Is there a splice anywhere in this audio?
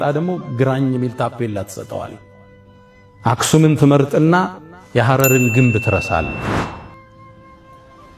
no; 0 cuts

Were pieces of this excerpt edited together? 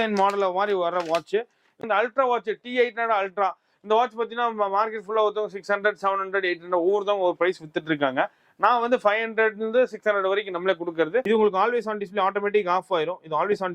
yes; 2 cuts; at 1.8 s, 11.2 s

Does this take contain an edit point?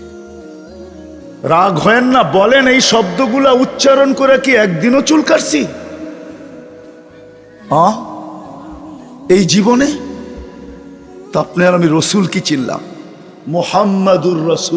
yes; 1 cut; at 1.4 s

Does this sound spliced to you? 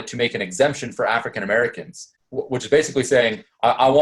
no; 0 cuts

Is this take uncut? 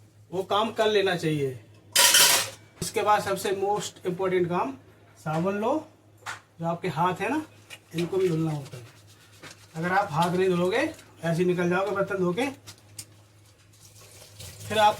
no; 1 cut; at 2.8 s

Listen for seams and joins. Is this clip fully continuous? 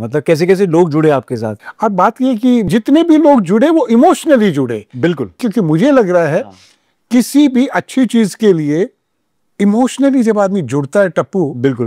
no; 3 cuts; at 1.5 s, 2.7 s, 5.4 s

